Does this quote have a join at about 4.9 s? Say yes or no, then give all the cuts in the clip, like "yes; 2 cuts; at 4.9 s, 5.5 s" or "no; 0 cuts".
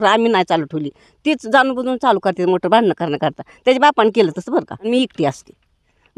yes; 1 cut; at 4.9 s